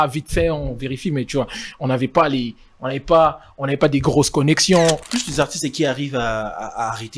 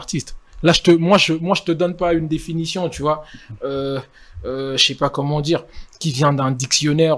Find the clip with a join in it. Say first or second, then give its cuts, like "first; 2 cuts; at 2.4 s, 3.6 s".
first; 1 cut; at 5.1 s